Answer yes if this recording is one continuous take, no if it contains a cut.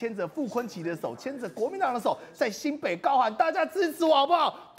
yes